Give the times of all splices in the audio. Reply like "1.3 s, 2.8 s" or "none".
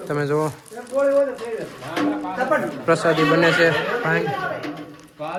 none